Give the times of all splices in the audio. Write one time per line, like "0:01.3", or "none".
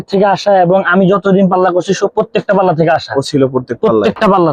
none